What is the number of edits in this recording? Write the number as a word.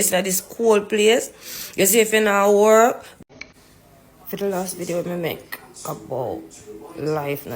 one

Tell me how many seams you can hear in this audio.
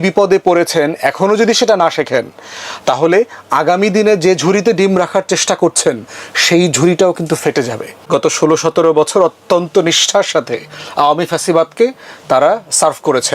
one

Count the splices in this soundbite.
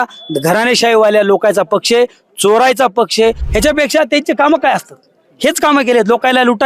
one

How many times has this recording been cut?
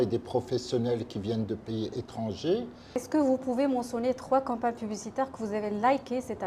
one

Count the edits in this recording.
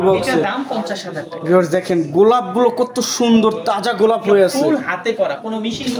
zero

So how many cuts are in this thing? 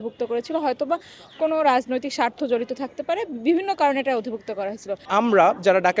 one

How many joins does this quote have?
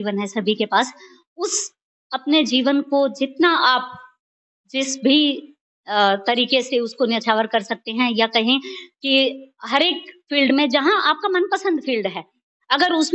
zero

